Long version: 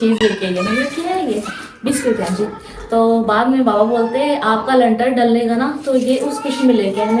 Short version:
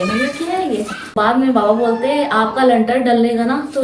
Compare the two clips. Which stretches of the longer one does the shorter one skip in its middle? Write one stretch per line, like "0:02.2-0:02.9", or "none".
0:01.7-0:03.3